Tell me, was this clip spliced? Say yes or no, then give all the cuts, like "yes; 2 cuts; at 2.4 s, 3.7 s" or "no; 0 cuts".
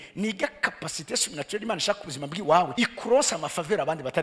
yes; 1 cut; at 2.7 s